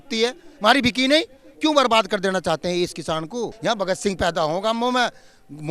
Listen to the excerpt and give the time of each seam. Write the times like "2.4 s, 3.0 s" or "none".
1.4 s, 3.5 s